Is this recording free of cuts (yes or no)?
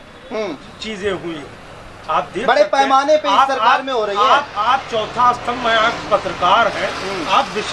yes